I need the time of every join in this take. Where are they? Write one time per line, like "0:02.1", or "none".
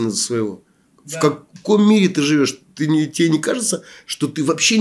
none

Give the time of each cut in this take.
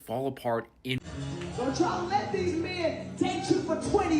0:01.0

